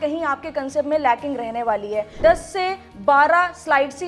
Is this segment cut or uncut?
cut